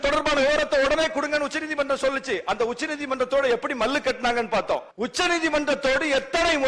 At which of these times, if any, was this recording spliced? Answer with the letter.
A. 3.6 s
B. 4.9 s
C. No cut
B